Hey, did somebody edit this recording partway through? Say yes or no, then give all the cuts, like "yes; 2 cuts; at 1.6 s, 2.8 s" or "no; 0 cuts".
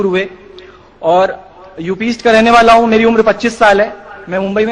yes; 1 cut; at 1.7 s